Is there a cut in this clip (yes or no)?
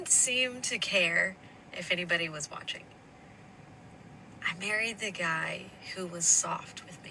no